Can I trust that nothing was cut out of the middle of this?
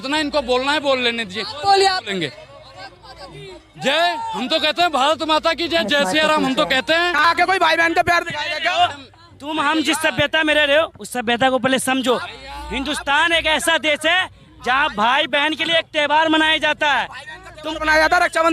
no; 1 cut; at 7.2 s

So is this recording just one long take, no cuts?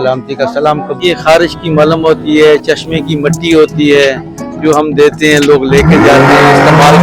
no; 1 cut; at 1.0 s

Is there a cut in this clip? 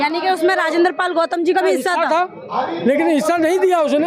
yes; 1 cut; at 2.1 s

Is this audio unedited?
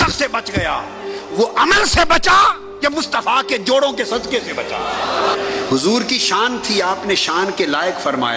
no; 1 cut; at 5.3 s

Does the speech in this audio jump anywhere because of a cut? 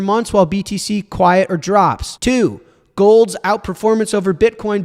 yes; 1 cut; at 2.1 s

